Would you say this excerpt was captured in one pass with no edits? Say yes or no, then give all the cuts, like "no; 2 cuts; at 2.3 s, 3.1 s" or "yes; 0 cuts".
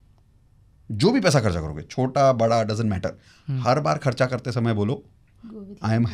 yes; 0 cuts